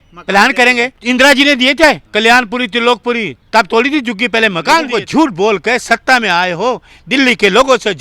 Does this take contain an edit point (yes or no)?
yes